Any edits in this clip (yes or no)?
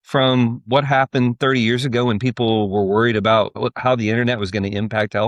yes